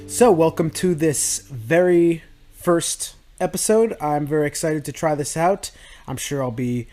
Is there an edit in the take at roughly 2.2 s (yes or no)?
no